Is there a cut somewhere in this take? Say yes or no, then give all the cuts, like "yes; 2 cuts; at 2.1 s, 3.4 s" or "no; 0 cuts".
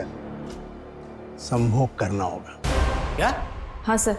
yes; 1 cut; at 2.6 s